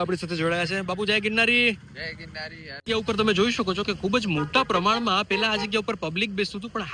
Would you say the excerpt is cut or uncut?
cut